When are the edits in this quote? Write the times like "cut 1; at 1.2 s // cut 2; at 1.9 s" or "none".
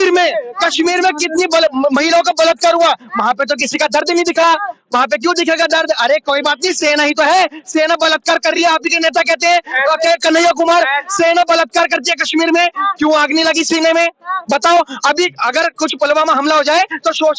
none